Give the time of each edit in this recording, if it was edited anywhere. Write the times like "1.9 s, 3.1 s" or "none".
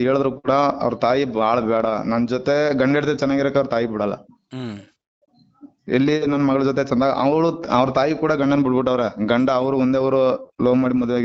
none